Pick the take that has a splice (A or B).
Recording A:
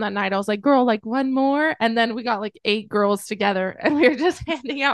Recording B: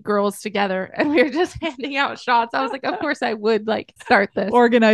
B